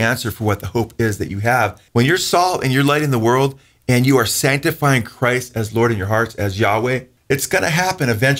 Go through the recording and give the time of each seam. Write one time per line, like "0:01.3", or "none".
0:01.8
0:07.1